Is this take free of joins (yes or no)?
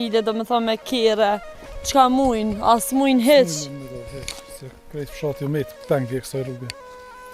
yes